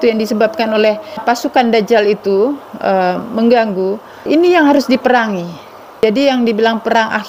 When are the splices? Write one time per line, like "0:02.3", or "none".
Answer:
0:01.2
0:04.2
0:06.0